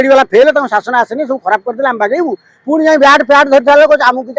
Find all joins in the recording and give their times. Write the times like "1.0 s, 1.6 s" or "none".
none